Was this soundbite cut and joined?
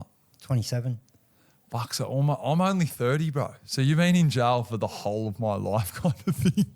no; 0 cuts

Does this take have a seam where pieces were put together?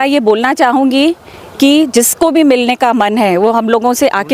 no; 0 cuts

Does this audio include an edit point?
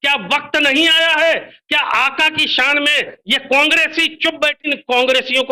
yes; 1 cut; at 4.6 s

